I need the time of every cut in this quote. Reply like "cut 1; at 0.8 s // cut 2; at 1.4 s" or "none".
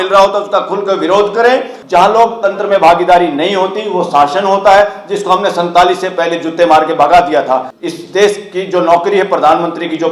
cut 1; at 1.8 s // cut 2; at 7.7 s